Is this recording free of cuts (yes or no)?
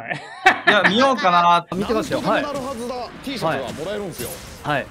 no